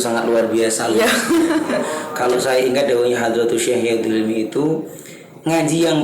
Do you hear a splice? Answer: yes; 1 cut; at 2.0 s

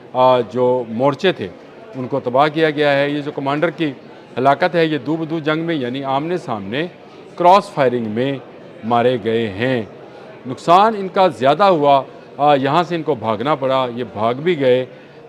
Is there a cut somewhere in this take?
no; 0 cuts

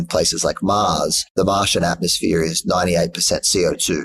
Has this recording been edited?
yes; 1 cut; at 1.3 s

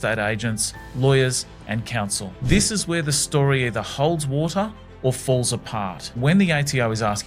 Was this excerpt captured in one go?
no; 1 cut; at 6.2 s

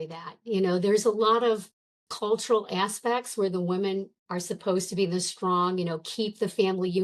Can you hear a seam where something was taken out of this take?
no; 0 cuts

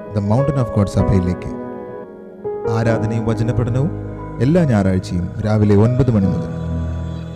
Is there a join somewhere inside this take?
yes; 1 cut; at 2.0 s

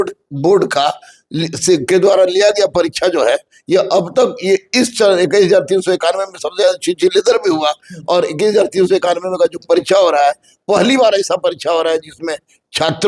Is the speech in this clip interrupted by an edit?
no; 0 cuts

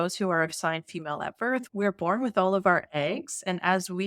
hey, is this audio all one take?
no; 1 cut; at 1.7 s

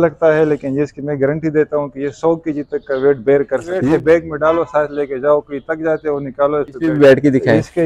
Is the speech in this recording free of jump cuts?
no; 2 cuts; at 3.8 s, 6.8 s

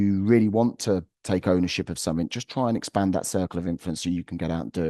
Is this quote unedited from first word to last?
yes; 0 cuts

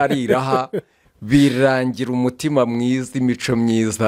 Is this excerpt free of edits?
yes; 0 cuts

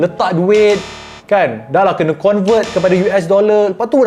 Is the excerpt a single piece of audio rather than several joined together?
yes; 0 cuts

